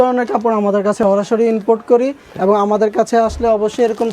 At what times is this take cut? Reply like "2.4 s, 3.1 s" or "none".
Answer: 1.0 s